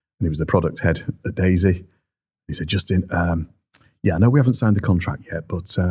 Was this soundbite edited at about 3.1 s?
no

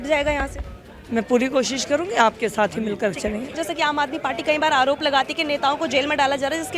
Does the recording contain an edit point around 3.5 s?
yes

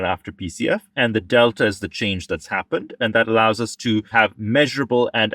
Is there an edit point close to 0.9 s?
no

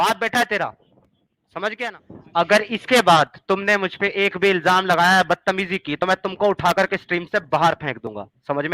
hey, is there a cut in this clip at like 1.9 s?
yes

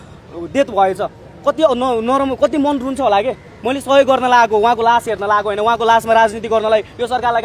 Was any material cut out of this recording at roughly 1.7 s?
no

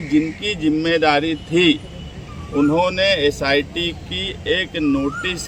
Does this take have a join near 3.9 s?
no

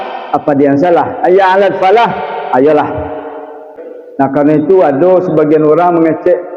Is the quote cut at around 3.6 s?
yes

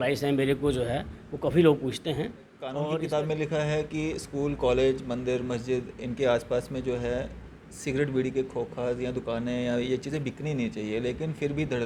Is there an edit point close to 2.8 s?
yes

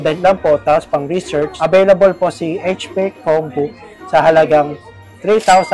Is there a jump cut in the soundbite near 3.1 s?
no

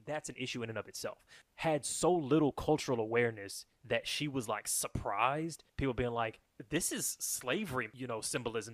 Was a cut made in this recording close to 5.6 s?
yes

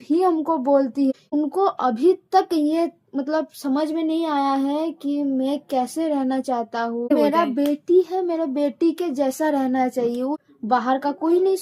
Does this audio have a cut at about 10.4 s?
yes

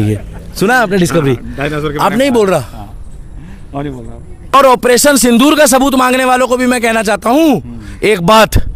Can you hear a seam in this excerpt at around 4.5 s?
yes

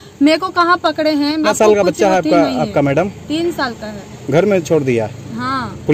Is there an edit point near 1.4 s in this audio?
yes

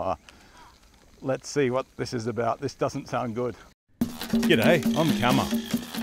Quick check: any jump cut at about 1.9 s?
no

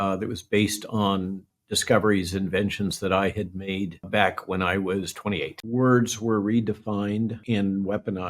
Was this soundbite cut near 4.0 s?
yes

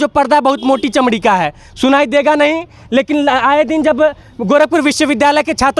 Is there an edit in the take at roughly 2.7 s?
no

